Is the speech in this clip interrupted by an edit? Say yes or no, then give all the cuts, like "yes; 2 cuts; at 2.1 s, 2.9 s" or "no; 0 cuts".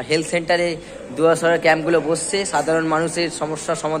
no; 0 cuts